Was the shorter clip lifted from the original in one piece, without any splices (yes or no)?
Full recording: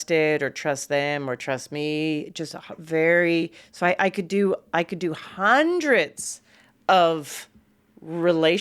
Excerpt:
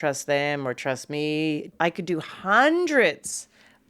no